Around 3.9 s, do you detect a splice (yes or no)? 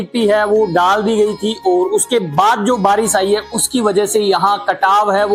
no